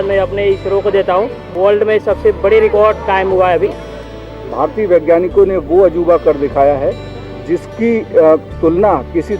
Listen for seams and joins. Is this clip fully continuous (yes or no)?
no